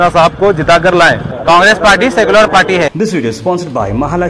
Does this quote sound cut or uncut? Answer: cut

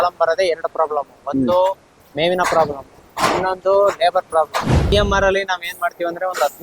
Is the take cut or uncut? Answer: cut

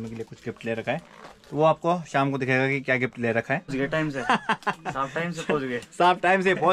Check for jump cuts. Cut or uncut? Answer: cut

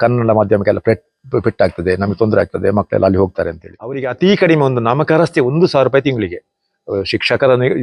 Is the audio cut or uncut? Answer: cut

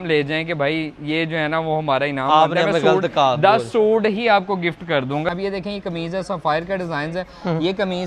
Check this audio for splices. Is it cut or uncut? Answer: cut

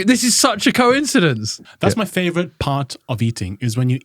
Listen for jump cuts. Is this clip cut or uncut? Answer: cut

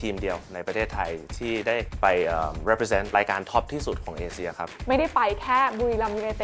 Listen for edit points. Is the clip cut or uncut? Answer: cut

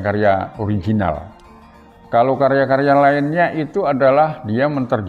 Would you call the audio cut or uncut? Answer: uncut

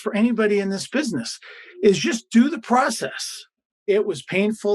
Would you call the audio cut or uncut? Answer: cut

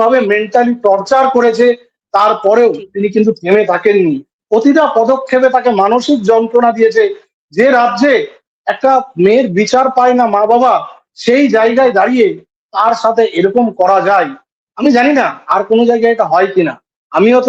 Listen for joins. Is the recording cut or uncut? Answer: uncut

